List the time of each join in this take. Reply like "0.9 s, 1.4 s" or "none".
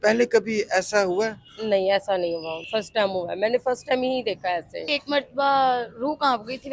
2.6 s, 4.8 s